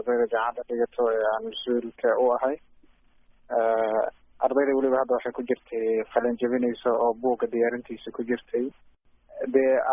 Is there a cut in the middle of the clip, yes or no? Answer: yes